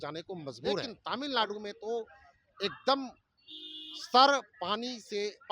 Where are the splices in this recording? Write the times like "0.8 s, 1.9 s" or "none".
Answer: 1.0 s